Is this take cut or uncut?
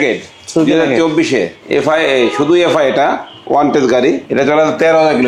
cut